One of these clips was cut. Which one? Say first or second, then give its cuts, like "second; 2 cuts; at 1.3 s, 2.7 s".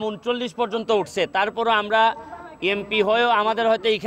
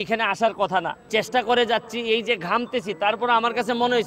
second; 1 cut; at 1.1 s